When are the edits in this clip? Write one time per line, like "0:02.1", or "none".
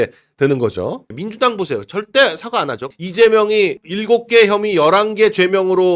0:01.2
0:02.9
0:03.8